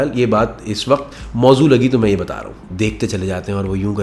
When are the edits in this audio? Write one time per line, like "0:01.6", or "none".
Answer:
0:02.6